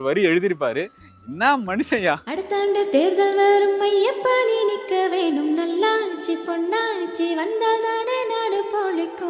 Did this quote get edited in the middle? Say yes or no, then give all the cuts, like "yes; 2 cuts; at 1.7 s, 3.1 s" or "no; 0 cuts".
yes; 1 cut; at 2.3 s